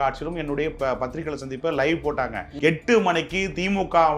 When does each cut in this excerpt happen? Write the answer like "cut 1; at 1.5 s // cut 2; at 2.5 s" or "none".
cut 1; at 2.5 s

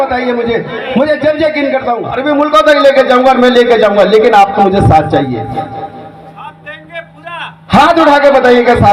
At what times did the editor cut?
cut 1; at 2.2 s

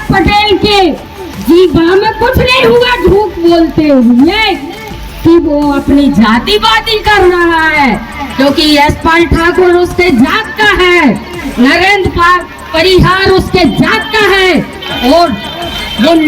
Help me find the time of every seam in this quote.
none

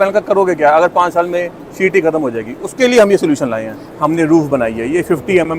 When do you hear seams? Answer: cut 1; at 3.9 s

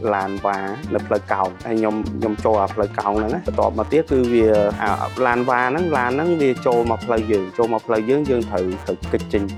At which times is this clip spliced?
none

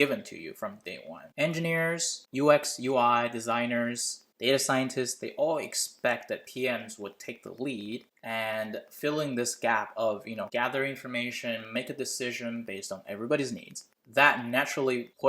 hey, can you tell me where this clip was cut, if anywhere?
cut 1; at 1.3 s // cut 2; at 10.5 s

